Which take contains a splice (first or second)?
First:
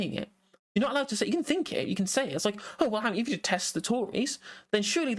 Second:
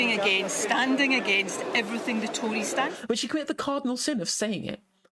second